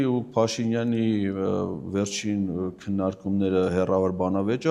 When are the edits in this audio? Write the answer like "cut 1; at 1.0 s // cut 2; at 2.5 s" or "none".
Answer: none